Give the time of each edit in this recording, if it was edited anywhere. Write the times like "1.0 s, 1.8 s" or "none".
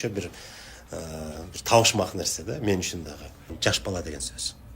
3.5 s